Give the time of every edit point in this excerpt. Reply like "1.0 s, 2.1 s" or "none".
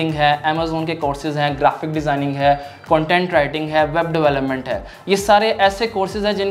none